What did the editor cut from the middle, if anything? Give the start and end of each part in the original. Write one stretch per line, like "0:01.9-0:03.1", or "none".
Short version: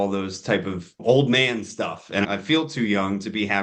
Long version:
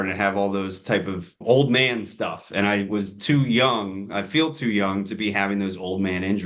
0:02.7-0:04.1